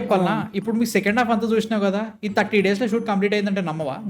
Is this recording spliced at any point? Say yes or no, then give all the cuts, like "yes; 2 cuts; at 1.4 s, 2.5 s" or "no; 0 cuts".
no; 0 cuts